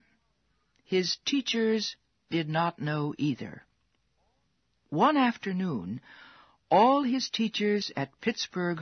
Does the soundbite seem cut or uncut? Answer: uncut